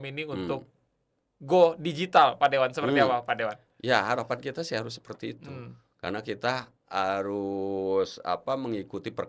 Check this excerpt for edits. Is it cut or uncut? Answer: uncut